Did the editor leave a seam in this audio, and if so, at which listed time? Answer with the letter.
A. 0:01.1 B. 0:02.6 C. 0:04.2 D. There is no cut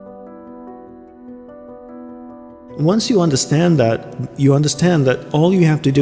B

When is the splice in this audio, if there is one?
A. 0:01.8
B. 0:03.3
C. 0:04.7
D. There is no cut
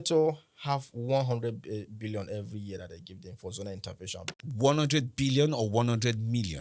C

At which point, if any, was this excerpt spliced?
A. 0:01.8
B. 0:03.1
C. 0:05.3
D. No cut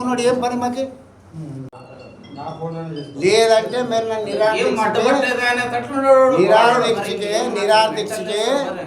A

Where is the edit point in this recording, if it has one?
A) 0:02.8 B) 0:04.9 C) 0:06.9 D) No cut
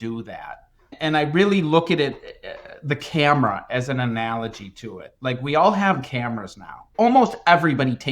C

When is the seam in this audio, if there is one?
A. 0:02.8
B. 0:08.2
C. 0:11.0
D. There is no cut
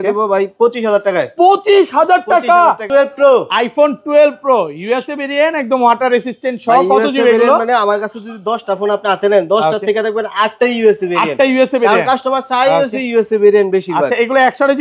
A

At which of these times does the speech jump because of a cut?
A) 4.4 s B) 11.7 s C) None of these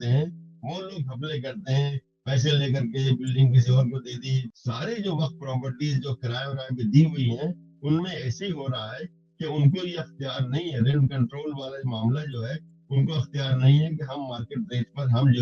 A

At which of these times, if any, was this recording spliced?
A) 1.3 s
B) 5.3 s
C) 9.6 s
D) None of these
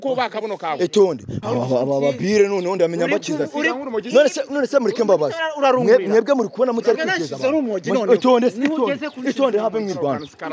A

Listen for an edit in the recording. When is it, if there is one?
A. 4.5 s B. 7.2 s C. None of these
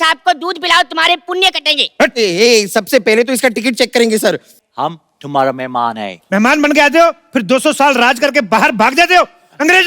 A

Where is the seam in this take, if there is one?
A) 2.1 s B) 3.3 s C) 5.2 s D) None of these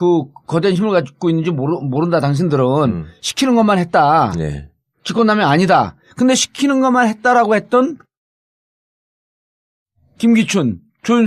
B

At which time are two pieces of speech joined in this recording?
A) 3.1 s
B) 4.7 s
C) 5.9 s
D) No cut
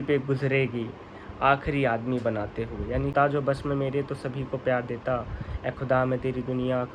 A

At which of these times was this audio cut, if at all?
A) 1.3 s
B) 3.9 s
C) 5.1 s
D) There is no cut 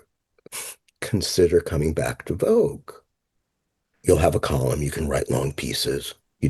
B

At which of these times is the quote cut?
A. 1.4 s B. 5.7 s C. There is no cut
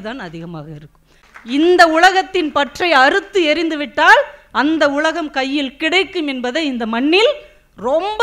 A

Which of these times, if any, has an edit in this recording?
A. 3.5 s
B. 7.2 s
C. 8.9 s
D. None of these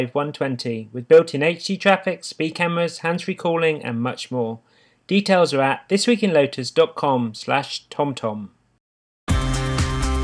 C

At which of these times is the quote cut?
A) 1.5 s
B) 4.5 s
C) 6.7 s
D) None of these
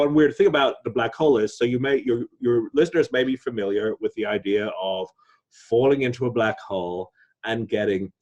D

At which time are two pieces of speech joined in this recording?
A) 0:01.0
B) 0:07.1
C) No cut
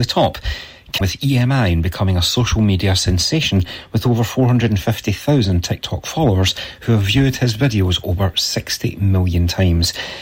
A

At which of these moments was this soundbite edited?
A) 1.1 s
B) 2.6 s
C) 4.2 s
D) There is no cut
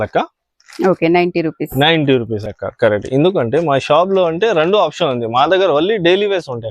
B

